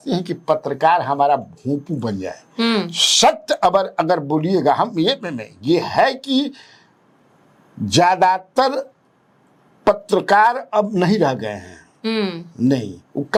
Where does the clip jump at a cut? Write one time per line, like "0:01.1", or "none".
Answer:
none